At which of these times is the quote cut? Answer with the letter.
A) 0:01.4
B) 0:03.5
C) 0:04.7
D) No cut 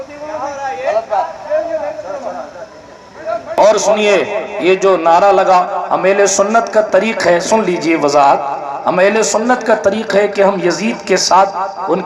B